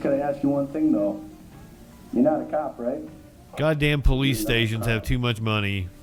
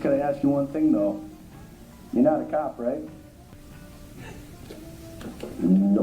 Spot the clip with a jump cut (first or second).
second